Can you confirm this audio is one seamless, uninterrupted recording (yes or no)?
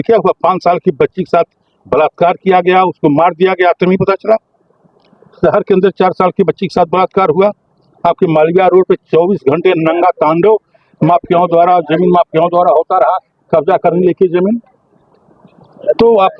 yes